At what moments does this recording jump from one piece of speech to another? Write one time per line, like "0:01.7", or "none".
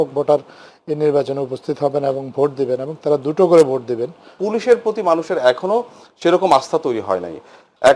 0:04.3